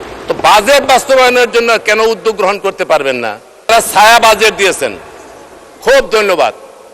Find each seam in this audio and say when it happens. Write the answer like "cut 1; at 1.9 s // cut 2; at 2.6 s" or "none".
cut 1; at 3.7 s